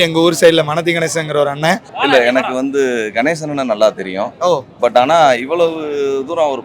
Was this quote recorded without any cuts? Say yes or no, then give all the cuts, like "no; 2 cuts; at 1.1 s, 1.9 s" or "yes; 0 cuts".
no; 1 cut; at 1.9 s